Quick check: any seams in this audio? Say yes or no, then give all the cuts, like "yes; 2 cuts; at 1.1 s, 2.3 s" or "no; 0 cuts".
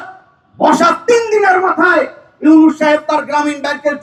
no; 0 cuts